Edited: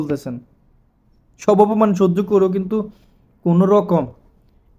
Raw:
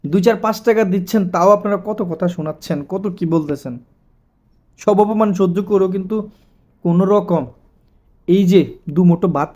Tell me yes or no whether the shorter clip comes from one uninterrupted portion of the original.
yes